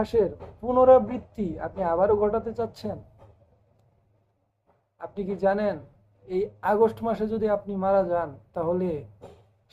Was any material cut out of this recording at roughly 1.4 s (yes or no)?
no